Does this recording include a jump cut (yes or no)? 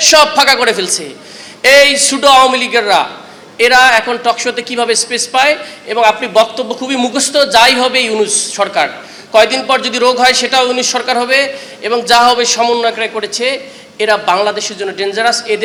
no